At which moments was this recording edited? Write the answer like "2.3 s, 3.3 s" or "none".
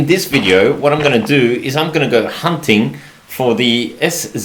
none